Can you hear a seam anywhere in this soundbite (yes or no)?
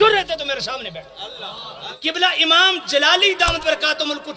yes